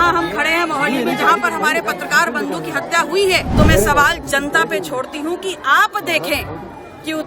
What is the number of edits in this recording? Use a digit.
1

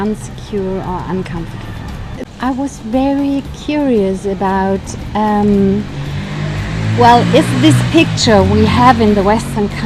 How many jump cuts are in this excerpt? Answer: 1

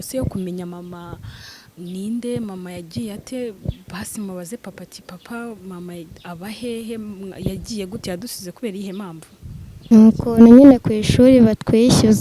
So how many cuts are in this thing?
1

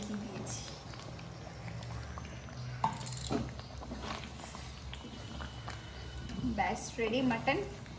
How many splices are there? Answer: 0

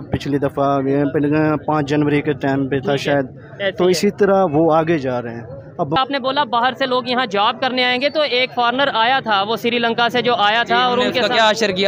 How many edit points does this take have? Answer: 1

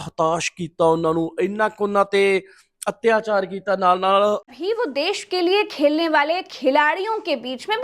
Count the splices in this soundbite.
1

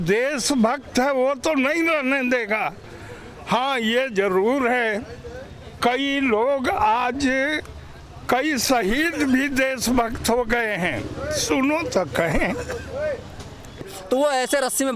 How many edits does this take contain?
1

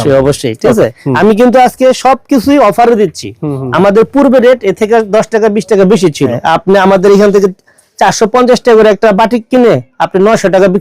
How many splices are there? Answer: 2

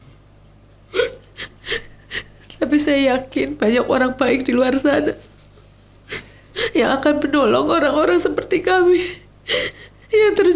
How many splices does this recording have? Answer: 0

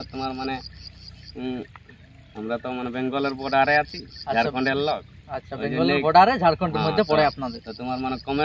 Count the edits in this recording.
0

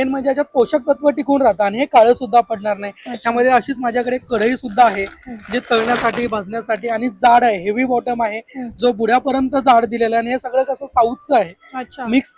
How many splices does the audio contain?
0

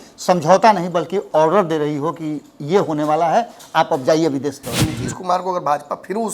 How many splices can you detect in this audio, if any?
1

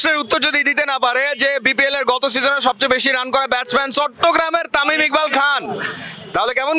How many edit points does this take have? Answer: 0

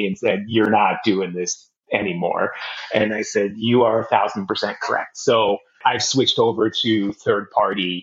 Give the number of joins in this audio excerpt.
1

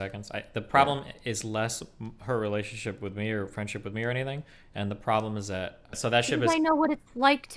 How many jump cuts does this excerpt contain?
1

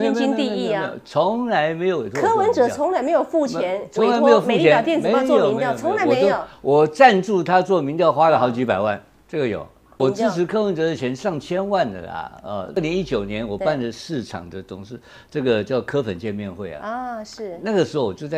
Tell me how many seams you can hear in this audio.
2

